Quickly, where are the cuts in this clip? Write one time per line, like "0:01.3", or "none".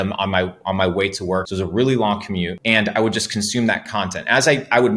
0:01.5
0:02.6

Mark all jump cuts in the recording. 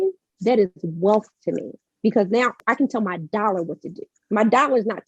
0:02.6

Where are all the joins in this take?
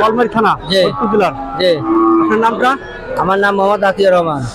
none

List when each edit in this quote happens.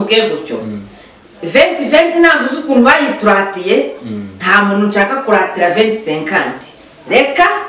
none

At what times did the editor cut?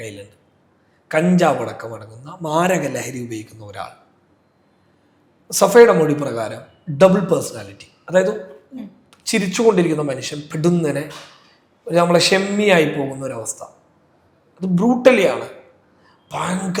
none

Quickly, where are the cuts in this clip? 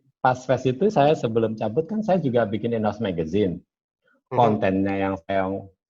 none

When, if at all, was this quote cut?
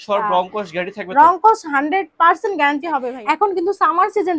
0:03.1

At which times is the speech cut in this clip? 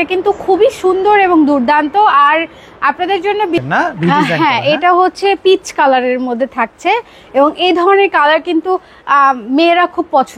0:03.6

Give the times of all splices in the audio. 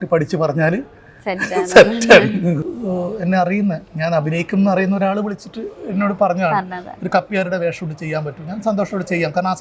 0:02.6

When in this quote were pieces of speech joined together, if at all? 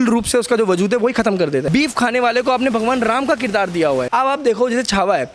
0:01.7
0:04.1

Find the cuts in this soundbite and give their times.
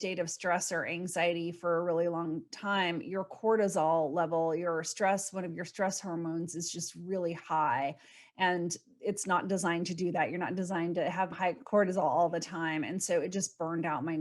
0:11.3

